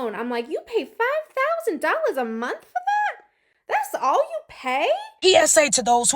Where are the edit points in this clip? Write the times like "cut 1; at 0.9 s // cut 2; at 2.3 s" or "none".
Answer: cut 1; at 5.2 s